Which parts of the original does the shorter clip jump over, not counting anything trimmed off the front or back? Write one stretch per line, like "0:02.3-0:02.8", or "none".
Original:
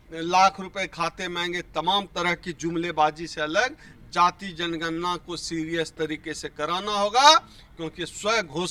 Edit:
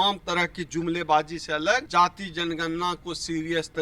0:03.7-0:04.1